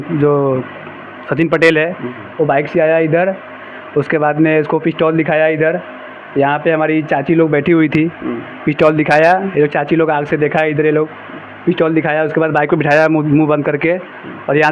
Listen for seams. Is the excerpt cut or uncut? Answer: uncut